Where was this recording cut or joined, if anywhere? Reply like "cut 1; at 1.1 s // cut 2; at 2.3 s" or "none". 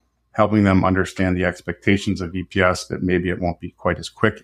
none